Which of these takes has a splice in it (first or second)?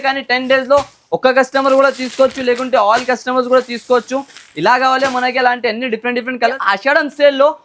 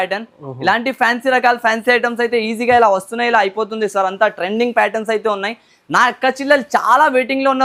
first